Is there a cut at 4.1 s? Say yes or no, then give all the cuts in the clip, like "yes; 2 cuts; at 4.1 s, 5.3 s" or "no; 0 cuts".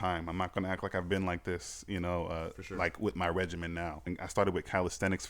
yes; 1 cut; at 4.1 s